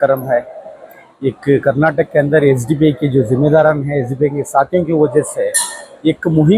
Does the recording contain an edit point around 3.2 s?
no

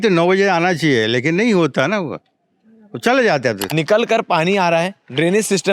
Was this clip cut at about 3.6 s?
yes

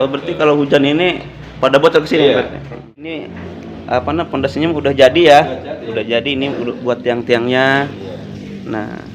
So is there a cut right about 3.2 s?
yes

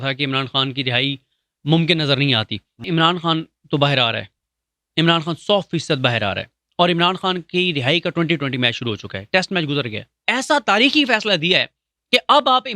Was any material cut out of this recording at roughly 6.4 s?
no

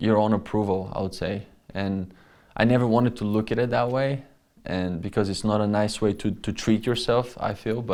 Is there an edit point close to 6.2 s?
no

